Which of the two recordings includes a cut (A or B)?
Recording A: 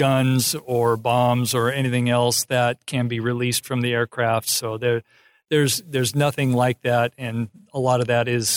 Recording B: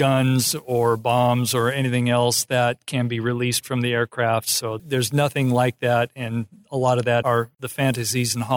B